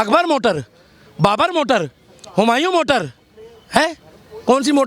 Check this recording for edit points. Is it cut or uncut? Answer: uncut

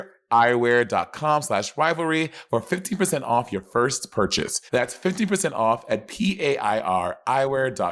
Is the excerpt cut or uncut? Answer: uncut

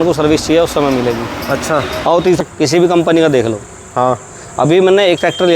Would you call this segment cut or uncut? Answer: cut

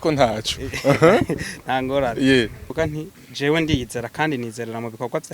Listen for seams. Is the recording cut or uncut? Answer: cut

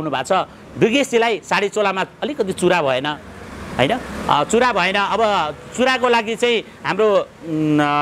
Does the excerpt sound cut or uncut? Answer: uncut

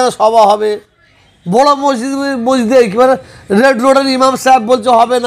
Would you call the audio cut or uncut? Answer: uncut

